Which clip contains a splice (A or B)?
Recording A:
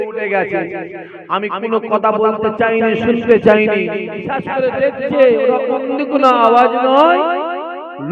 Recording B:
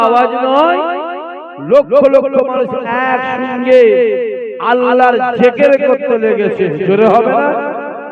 A